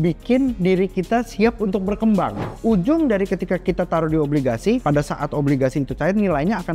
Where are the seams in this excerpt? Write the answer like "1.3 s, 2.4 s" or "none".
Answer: 2.4 s